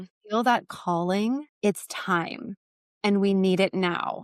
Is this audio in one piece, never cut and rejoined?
no; 1 cut; at 1.5 s

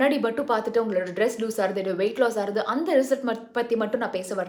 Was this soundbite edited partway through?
no; 0 cuts

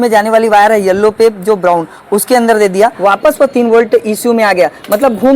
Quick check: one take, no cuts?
no; 1 cut; at 3.0 s

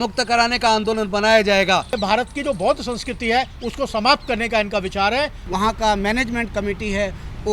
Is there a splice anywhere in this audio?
yes; 2 cuts; at 2.0 s, 5.4 s

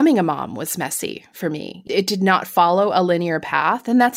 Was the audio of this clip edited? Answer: yes; 1 cut; at 1.8 s

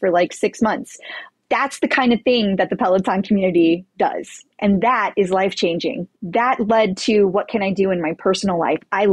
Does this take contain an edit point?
yes; 2 cuts; at 1.3 s, 6.1 s

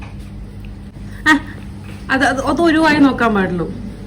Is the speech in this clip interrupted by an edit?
yes; 1 cut; at 0.9 s

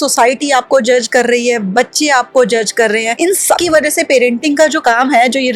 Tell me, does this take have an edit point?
yes; 2 cuts; at 3.5 s, 4.8 s

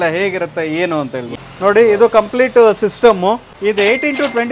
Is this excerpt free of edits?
no; 2 cuts; at 1.3 s, 3.5 s

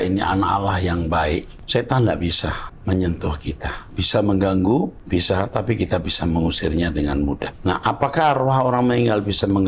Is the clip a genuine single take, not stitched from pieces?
no; 4 cuts; at 1.6 s, 2.7 s, 5.0 s, 7.5 s

